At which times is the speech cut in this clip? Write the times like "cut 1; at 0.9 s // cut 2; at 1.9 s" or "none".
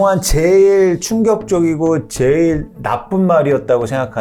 none